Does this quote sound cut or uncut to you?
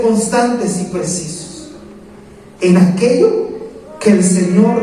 uncut